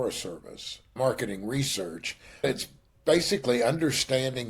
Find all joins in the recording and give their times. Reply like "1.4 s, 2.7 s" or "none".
0.9 s, 2.4 s